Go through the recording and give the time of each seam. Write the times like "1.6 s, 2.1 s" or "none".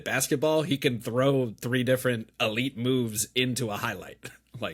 none